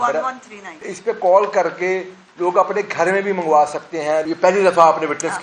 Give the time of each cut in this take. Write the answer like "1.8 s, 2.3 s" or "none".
0.9 s, 4.2 s